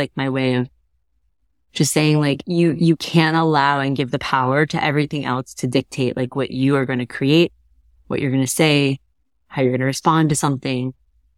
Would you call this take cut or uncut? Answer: cut